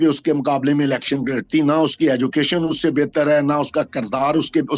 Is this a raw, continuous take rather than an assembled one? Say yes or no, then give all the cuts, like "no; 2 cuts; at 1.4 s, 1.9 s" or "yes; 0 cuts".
yes; 0 cuts